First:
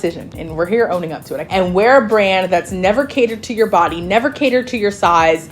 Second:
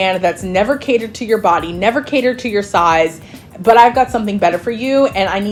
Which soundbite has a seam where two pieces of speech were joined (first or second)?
first